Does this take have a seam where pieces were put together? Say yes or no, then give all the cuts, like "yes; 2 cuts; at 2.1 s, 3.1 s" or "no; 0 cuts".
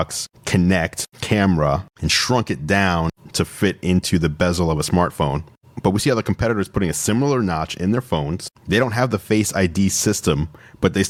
no; 0 cuts